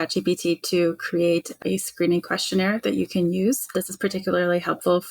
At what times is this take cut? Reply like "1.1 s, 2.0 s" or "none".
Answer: 1.6 s, 3.7 s